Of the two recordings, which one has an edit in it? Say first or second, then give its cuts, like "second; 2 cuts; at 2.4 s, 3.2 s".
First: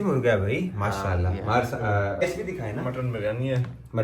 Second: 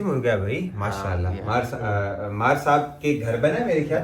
first; 1 cut; at 2.2 s